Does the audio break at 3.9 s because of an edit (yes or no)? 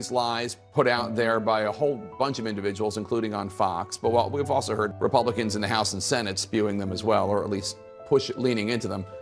no